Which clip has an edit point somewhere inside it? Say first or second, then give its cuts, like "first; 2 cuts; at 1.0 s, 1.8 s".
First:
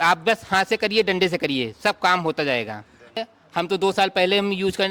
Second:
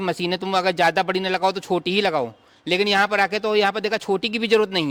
first; 1 cut; at 3.3 s